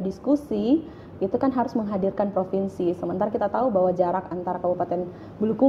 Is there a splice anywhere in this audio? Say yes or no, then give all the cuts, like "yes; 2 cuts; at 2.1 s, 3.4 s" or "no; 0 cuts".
no; 0 cuts